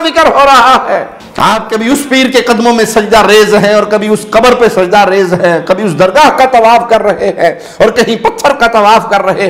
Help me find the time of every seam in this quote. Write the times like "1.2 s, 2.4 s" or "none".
1.2 s